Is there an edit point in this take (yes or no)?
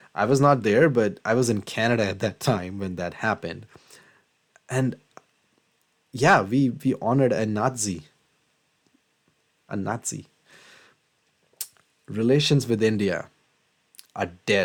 no